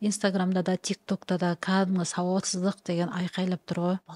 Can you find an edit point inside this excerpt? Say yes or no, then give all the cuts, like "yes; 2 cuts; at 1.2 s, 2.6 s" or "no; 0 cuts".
no; 0 cuts